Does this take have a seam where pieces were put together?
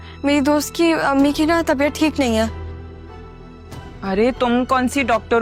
no; 0 cuts

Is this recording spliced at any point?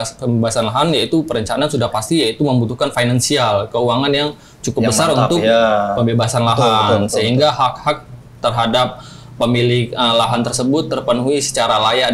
no; 0 cuts

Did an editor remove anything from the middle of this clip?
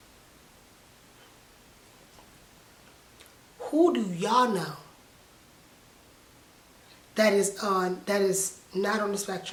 no; 0 cuts

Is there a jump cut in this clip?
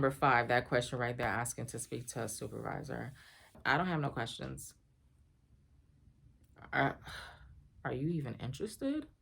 yes; 1 cut; at 3.6 s

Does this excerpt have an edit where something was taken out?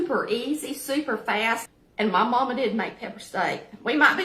yes; 1 cut; at 1.6 s

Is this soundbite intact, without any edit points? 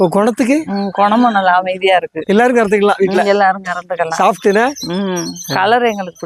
yes; 0 cuts

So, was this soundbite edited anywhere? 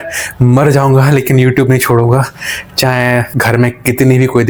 no; 0 cuts

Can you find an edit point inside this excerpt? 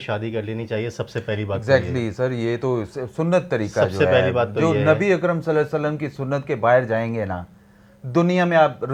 no; 0 cuts

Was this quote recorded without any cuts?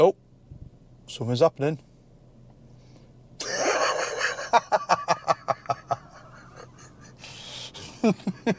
yes; 0 cuts

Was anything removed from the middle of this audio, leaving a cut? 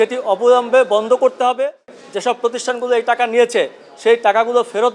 yes; 1 cut; at 2.0 s

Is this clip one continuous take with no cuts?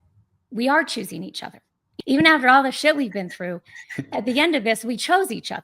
no; 1 cut; at 1.8 s

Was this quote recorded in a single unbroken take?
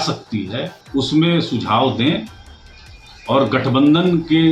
yes; 0 cuts

